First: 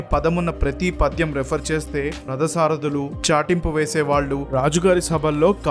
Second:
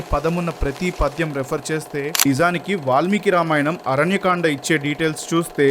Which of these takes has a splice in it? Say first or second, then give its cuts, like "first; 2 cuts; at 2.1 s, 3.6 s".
second; 1 cut; at 2.2 s